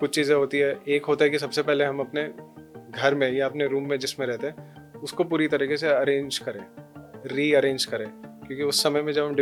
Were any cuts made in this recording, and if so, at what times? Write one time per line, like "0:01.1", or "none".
none